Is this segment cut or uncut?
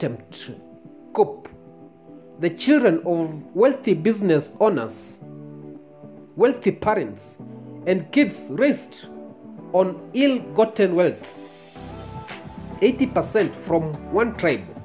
cut